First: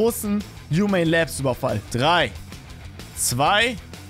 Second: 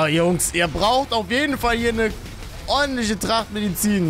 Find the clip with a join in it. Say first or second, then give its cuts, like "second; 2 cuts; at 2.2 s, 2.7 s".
first; 1 cut; at 1.8 s